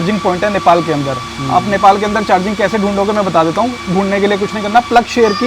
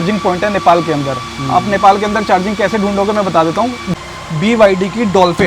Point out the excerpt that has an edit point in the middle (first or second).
second